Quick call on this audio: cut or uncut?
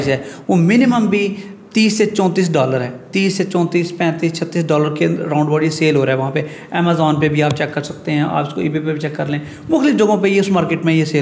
uncut